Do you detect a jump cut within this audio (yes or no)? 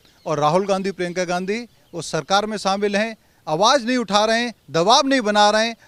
no